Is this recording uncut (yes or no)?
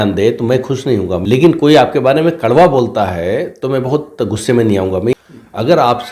no